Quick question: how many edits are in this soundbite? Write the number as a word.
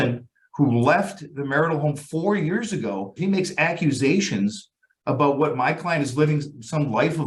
one